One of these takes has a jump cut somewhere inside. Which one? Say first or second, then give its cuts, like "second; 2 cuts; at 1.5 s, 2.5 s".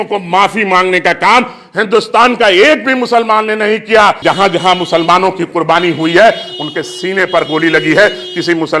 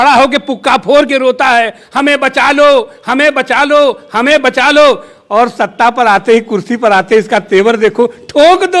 first; 1 cut; at 4.2 s